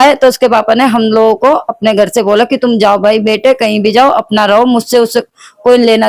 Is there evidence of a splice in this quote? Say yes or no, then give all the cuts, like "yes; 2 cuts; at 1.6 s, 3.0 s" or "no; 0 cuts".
no; 0 cuts